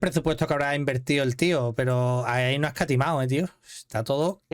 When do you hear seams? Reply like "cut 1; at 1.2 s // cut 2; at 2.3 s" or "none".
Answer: none